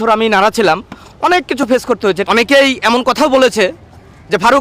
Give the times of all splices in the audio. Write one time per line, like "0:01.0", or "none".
0:02.2